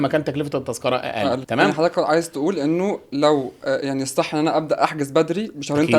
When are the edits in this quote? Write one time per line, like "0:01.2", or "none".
0:01.4